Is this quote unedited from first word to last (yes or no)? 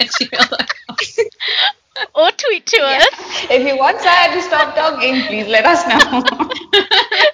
yes